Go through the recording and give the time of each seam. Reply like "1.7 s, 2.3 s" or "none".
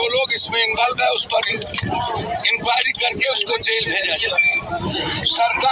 none